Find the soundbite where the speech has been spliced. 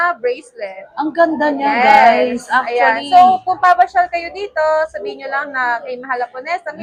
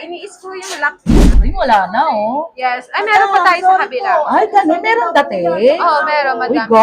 second; 1 cut; at 1.4 s

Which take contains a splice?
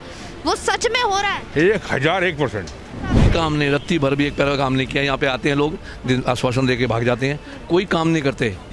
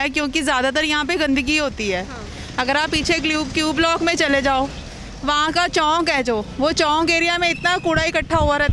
first; 1 cut; at 3.2 s

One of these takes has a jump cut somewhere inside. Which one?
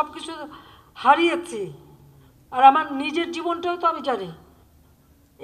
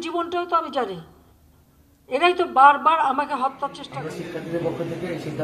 second; 1 cut; at 3.8 s

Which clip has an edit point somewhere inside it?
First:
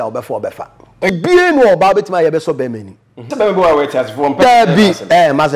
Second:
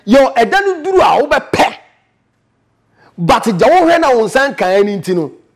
first; 2 cuts; at 1.1 s, 3.3 s

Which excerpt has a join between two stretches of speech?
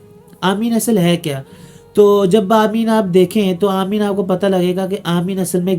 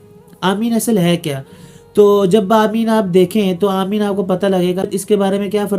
second; 1 cut; at 4.9 s

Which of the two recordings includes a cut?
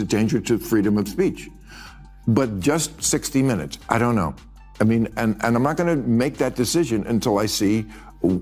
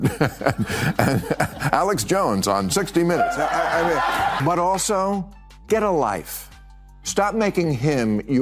second; 1 cut; at 4.4 s

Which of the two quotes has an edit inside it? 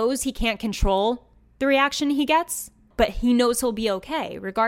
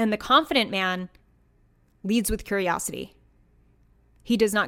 first; 1 cut; at 2.9 s

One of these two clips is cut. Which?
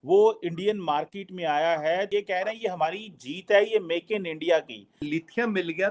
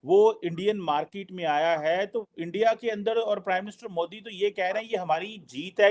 first; 2 cuts; at 2.1 s, 5.0 s

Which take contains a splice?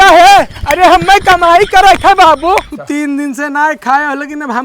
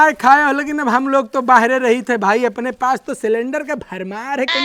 first; 1 cut; at 2.7 s

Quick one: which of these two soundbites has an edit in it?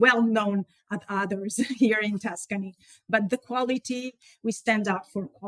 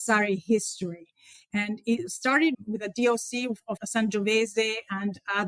second; 2 cuts; at 2.6 s, 3.8 s

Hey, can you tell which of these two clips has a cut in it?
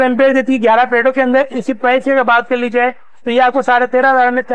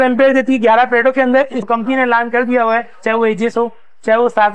second; 1 cut; at 1.6 s

